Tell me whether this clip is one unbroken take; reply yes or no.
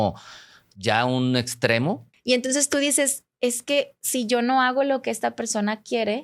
no